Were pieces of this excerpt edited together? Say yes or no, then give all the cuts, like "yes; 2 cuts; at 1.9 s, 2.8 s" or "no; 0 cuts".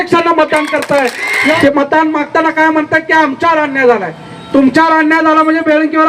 yes; 1 cut; at 1.6 s